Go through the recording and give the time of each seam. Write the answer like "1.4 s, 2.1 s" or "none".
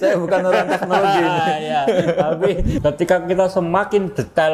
2.7 s